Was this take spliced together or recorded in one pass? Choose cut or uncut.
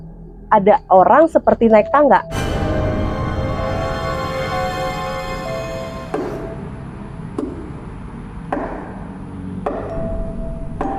uncut